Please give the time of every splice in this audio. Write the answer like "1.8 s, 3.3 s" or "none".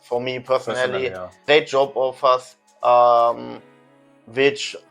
1.3 s

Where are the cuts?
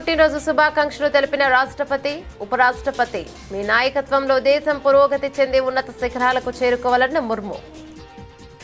7.6 s

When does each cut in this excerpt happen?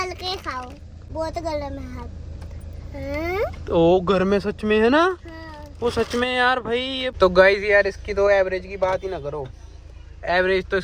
1.0 s, 7.0 s

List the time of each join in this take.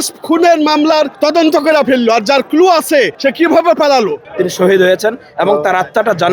1.1 s, 3.1 s, 4.3 s

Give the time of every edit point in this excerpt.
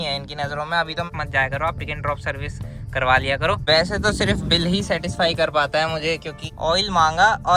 1.1 s, 3.6 s, 6.5 s

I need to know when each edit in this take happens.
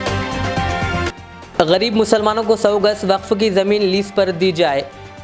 1.0 s

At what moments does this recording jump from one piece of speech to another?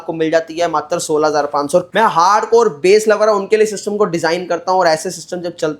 1.9 s

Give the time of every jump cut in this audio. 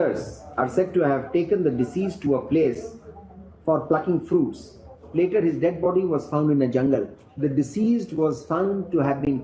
5.1 s, 7.2 s

